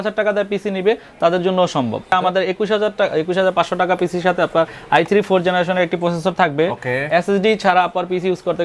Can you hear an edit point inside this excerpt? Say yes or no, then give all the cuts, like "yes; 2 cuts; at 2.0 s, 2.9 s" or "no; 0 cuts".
yes; 2 cuts; at 2.1 s, 7.0 s